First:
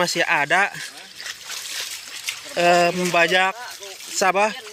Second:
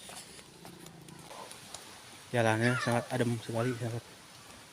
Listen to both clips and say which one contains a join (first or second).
second